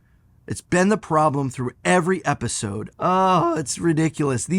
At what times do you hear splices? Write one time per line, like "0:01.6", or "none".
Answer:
0:02.9